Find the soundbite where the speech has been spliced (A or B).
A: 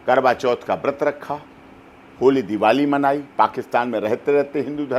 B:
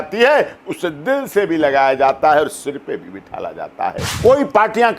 B